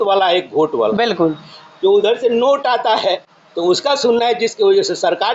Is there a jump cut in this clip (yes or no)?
no